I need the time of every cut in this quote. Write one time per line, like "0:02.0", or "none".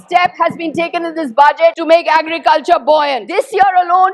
0:01.8
0:03.2